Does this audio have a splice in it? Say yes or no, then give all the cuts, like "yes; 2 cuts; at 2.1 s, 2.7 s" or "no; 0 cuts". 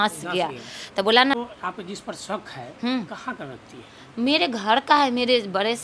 yes; 1 cut; at 1.3 s